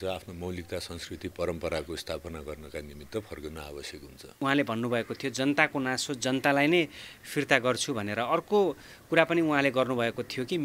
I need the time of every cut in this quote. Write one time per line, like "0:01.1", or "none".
0:04.3